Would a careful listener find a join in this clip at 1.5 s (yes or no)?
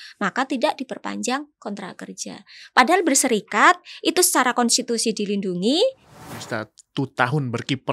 no